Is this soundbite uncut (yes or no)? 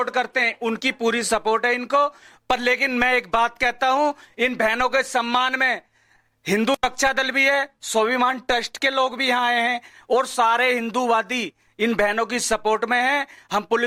yes